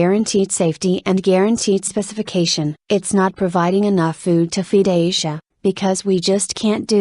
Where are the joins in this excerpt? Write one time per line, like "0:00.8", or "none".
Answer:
0:02.6